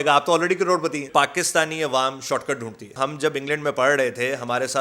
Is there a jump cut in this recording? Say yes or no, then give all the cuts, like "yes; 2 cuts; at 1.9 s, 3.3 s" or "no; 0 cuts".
yes; 2 cuts; at 1.1 s, 3.0 s